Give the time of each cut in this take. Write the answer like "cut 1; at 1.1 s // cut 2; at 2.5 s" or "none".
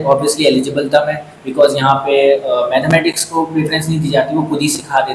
none